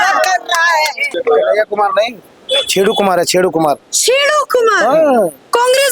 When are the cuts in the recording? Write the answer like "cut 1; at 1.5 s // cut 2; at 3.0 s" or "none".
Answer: cut 1; at 1.1 s